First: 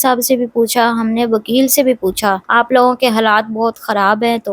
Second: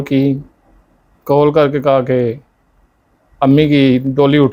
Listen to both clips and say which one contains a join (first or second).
first